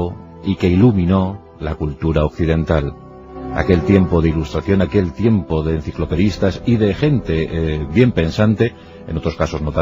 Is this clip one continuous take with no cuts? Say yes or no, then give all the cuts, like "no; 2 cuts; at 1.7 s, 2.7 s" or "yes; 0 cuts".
no; 1 cut; at 1.0 s